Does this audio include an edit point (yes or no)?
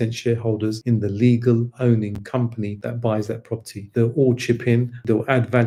no